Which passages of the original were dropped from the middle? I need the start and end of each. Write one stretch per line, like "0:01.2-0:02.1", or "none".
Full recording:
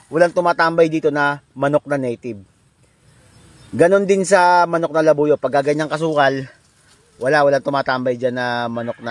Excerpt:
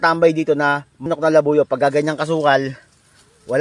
0:01.6-0:04.8

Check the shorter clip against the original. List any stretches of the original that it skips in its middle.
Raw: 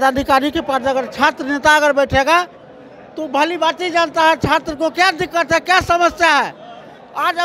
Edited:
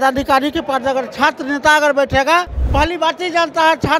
0:02.6-0:03.2

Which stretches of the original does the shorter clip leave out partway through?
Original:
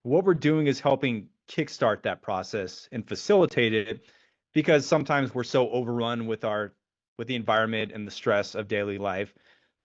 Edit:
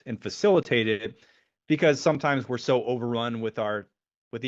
none

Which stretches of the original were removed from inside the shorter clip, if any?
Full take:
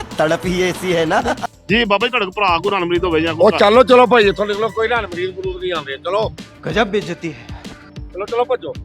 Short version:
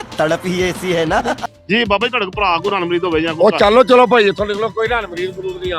none

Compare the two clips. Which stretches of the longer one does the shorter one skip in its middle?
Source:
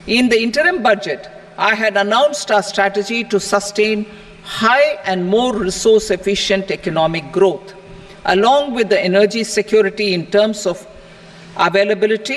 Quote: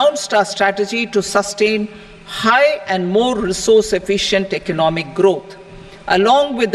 none

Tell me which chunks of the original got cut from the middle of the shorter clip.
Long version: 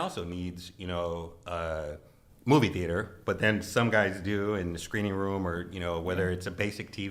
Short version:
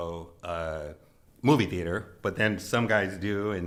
none

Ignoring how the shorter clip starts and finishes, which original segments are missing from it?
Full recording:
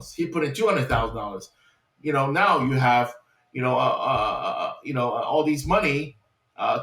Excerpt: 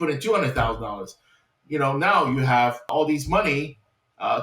0:03.2-0:05.2

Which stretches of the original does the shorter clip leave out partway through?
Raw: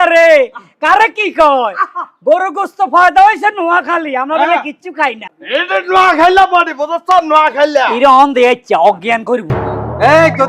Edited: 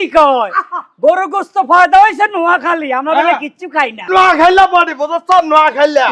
0:05.3-0:05.8

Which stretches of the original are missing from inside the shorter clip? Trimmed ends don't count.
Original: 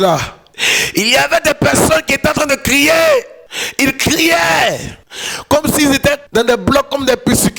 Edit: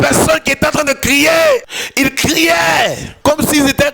0:03.4-0:03.6
0:04.9-0:05.3

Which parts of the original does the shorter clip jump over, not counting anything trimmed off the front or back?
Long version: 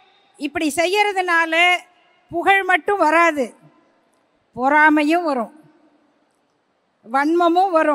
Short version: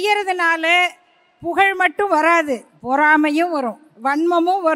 0:03.6-0:04.4
0:05.6-0:06.9

